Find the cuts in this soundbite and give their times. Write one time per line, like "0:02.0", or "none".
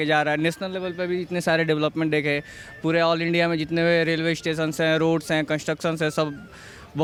none